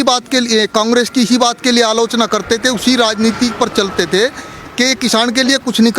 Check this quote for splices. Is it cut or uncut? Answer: uncut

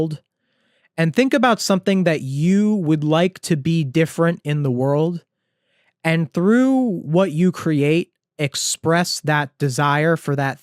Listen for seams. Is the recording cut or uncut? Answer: uncut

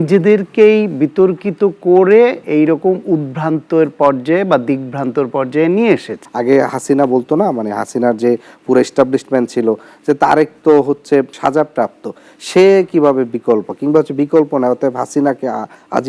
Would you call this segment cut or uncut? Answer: cut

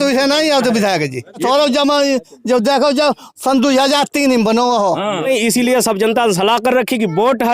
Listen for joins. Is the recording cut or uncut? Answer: cut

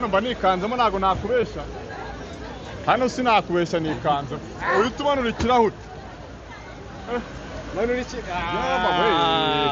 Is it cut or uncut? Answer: uncut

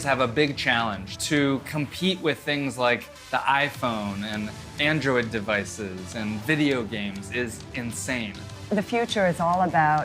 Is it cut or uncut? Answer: cut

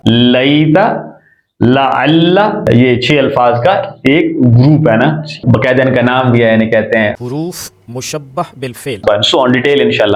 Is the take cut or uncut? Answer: uncut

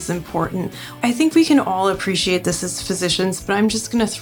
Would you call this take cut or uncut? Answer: cut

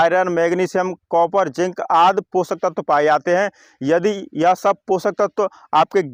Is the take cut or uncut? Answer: uncut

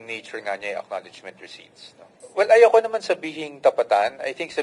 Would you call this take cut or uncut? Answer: cut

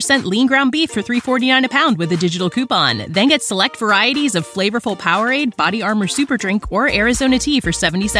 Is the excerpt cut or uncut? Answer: uncut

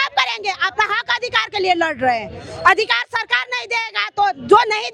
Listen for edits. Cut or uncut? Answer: uncut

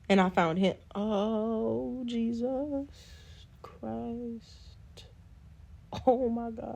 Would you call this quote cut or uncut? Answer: cut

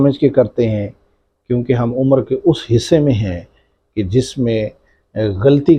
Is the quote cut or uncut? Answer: uncut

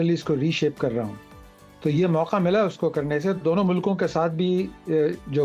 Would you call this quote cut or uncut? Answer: uncut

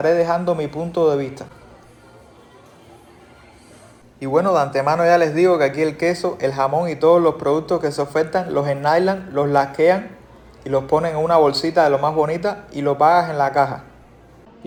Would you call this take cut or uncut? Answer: uncut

